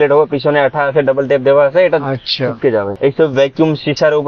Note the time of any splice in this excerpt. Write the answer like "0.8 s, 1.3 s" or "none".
none